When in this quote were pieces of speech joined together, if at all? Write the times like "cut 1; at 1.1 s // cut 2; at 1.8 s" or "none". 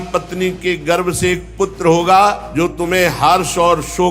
cut 1; at 2.4 s